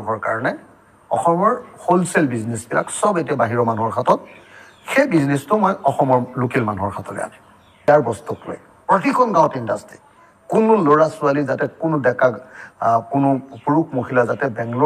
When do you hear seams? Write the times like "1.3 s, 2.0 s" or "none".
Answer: 7.9 s